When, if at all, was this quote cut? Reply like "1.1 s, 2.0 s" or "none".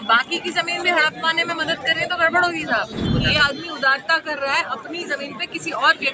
3.1 s